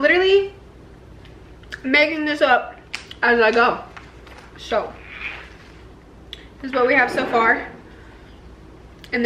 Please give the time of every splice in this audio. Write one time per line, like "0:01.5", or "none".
none

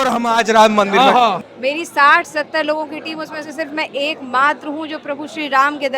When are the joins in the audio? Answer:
0:01.4

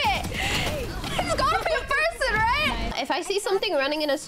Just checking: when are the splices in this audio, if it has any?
0:02.9

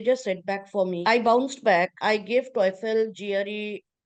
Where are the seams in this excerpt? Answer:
0:01.0
0:02.0

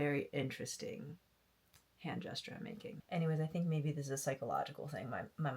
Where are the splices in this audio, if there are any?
0:03.0

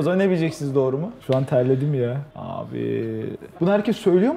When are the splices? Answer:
0:02.2

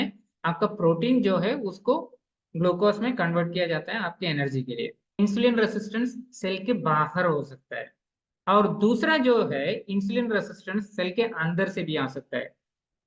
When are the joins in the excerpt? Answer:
0:05.2

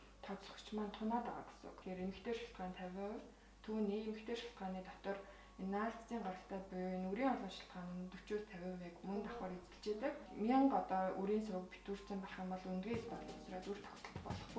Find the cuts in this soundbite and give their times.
0:01.8
0:10.3

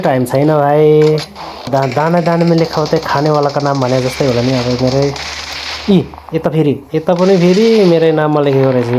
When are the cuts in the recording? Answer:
0:01.7

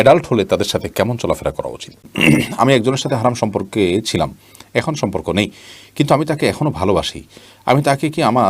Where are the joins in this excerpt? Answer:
0:02.1

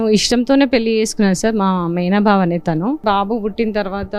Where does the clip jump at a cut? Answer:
0:03.0

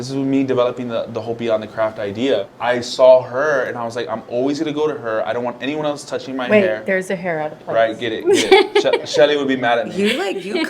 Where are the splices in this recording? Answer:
0:02.5

